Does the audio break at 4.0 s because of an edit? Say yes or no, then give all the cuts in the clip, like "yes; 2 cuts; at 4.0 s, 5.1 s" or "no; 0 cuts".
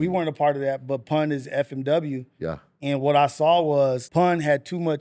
yes; 1 cut; at 4.0 s